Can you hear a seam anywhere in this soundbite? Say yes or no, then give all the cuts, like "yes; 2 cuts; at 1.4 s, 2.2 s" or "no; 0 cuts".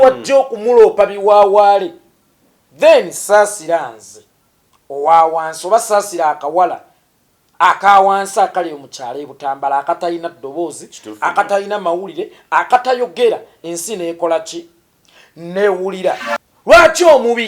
yes; 1 cut; at 16.3 s